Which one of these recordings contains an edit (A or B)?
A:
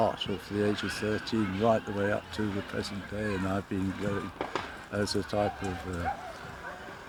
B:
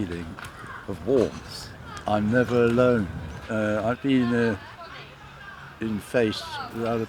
B